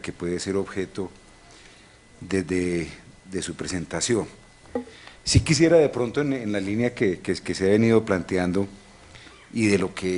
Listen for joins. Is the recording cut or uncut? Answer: cut